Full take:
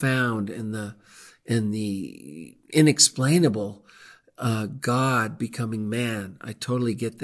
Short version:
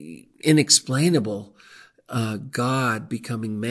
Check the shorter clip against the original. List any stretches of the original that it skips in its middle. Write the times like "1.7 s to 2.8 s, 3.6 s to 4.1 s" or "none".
none